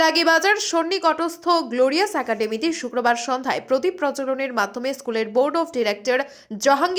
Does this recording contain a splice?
no; 0 cuts

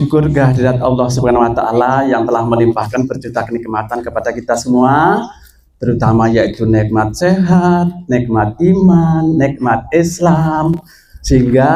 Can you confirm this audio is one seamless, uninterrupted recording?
yes; 0 cuts

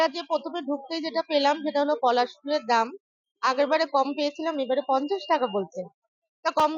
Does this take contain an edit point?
no; 0 cuts

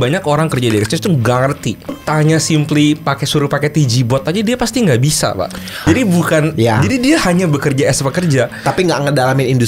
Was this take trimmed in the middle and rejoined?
yes; 2 cuts; at 2.0 s, 5.8 s

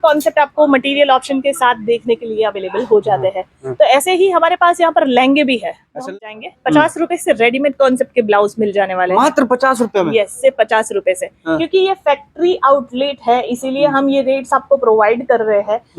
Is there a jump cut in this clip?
yes; 1 cut; at 5.9 s

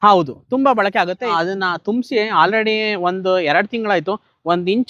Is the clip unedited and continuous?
no; 1 cut; at 1.3 s

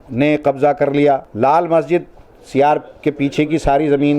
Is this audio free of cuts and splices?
no; 1 cut; at 1.3 s

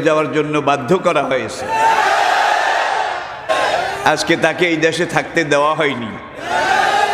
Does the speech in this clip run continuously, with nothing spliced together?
no; 1 cut; at 3.5 s

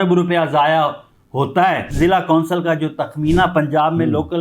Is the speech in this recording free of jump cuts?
no; 1 cut; at 1.9 s

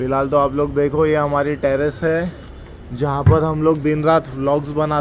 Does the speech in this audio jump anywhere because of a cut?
no; 0 cuts

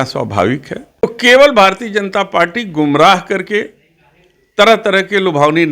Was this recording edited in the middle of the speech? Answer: yes; 1 cut; at 1.0 s

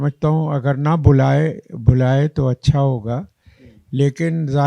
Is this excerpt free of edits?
yes; 0 cuts

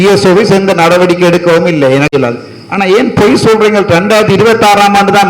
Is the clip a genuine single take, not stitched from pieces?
no; 1 cut; at 2.1 s

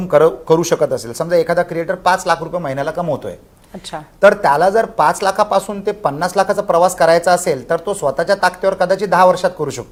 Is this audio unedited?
yes; 0 cuts

